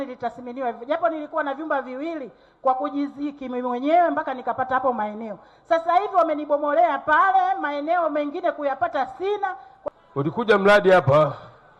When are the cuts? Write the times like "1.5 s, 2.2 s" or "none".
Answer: 9.7 s